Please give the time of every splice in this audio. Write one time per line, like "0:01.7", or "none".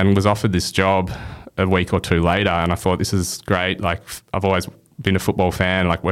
none

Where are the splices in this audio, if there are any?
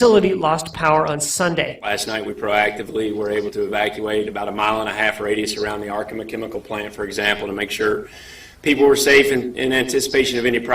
0:08.1

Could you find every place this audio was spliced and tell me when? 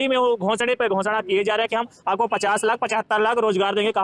none

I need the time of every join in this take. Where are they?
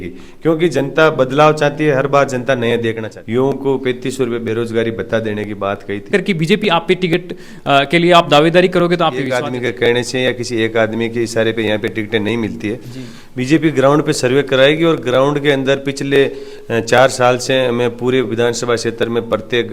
0:03.1
0:06.1
0:09.3

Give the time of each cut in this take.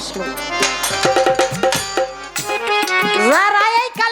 0:02.3

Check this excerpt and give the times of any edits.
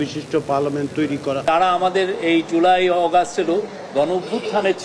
0:01.5

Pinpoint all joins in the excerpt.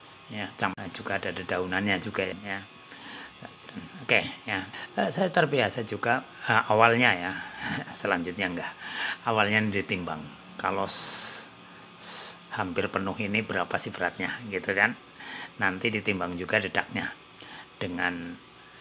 none

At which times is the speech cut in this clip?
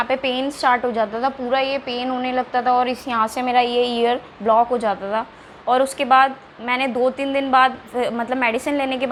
none

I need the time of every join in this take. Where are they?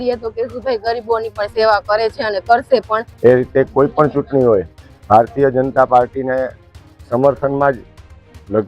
0:03.0

